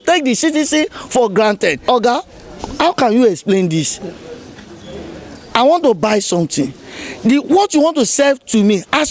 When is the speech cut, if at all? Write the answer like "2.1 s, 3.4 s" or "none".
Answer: 1.8 s